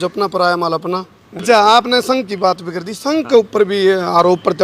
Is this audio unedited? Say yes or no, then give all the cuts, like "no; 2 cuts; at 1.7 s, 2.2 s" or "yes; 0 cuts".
no; 1 cut; at 1.4 s